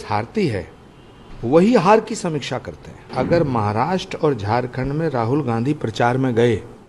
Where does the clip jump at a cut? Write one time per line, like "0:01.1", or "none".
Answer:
0:03.1